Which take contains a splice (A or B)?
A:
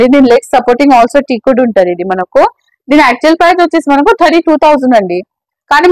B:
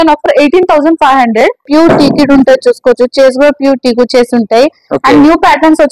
B